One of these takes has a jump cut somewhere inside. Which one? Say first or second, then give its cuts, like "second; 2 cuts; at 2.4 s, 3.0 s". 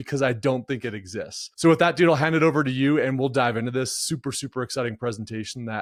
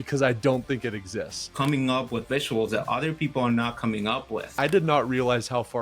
second; 2 cuts; at 1.5 s, 4.5 s